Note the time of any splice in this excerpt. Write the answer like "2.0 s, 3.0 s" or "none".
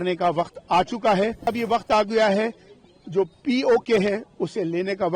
1.5 s